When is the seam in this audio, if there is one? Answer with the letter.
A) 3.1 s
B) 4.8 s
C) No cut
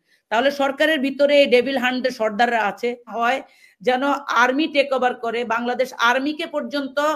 A